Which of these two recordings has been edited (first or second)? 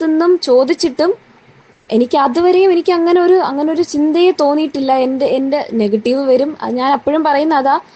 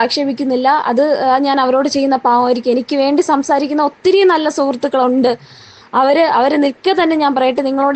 second